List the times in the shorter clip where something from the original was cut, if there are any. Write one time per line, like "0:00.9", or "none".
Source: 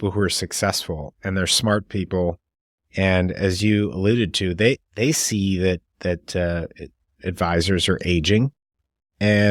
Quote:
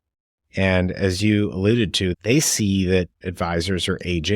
0:02.1
0:03.2